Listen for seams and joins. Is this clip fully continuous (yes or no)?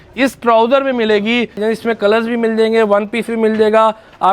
no